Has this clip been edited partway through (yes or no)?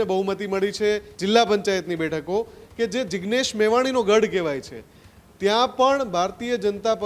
yes